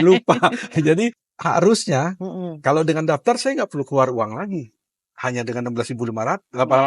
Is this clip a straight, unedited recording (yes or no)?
no